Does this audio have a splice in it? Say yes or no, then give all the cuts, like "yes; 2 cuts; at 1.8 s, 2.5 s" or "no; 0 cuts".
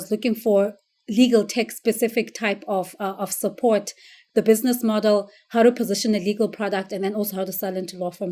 yes; 1 cut; at 4.2 s